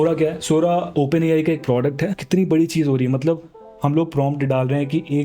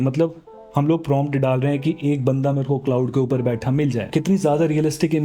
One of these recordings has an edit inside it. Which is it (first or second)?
first